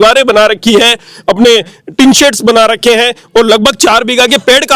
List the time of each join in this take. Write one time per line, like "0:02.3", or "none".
none